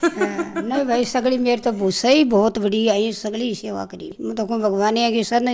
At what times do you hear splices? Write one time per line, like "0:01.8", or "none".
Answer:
0:04.1